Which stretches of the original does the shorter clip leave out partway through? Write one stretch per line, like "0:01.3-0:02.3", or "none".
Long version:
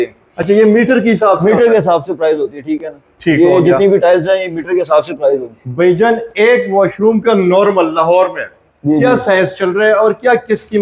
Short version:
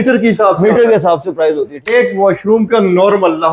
0:02.6-0:06.3